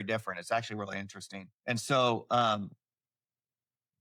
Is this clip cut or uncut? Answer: uncut